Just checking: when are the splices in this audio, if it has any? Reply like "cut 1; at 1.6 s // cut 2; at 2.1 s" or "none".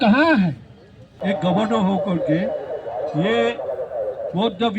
cut 1; at 1.1 s